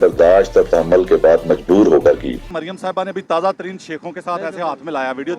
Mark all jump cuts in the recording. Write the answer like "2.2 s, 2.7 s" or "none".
2.5 s